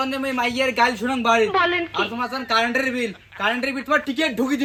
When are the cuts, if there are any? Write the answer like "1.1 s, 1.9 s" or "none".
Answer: none